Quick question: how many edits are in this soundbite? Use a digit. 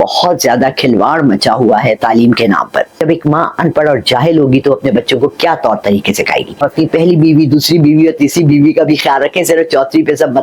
2